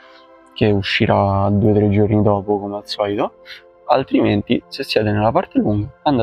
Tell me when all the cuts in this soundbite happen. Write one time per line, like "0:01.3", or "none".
none